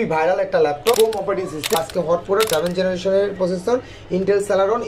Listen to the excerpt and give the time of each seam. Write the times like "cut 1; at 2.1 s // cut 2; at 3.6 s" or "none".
cut 1; at 1.8 s